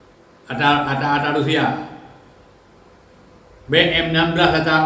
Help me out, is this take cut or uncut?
uncut